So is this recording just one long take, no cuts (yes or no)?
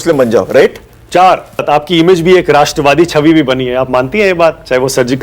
no